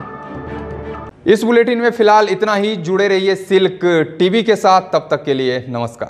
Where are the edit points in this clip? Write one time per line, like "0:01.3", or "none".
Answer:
none

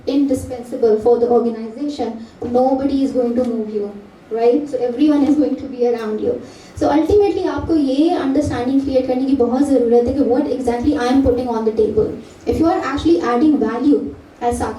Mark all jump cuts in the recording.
none

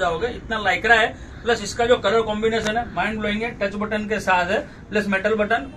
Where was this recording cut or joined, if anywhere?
none

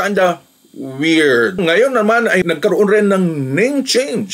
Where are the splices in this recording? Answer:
0:01.5
0:02.4

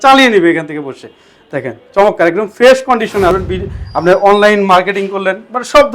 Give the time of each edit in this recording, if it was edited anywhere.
0:03.3

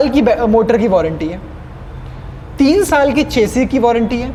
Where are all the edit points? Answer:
none

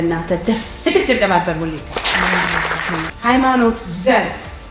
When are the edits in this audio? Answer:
0:03.1

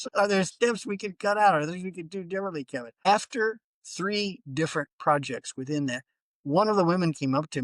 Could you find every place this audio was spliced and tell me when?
0:03.1

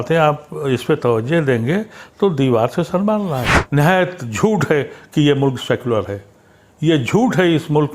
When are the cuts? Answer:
0:03.5

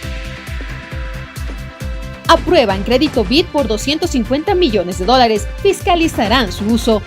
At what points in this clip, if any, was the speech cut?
0:01.1

